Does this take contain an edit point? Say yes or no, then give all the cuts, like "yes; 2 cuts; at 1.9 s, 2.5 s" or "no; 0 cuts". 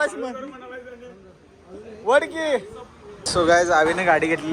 yes; 1 cut; at 3.2 s